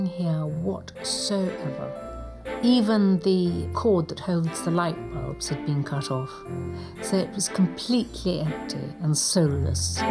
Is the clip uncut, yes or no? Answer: yes